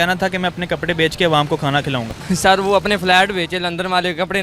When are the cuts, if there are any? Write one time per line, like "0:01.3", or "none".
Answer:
0:02.1